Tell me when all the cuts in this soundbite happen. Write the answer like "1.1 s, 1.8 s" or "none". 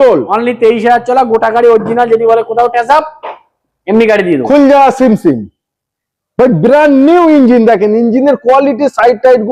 none